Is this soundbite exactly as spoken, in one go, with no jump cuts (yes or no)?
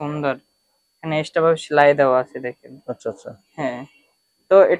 yes